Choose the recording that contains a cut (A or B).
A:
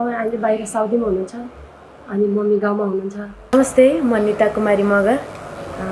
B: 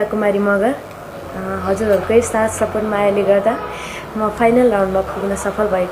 A